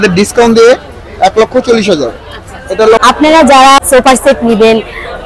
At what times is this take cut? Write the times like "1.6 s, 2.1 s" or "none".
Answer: 3.0 s, 3.8 s